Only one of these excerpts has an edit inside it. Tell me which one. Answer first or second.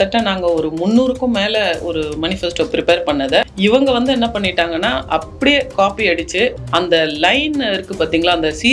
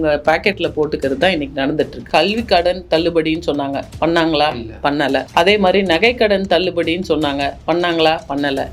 second